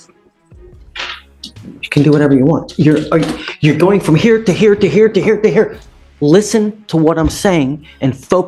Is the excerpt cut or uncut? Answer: uncut